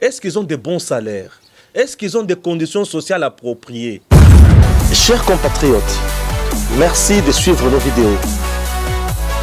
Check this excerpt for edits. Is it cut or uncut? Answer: cut